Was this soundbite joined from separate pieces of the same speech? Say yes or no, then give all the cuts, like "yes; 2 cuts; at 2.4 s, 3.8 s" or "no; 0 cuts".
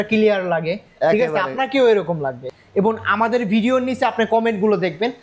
yes; 1 cut; at 2.3 s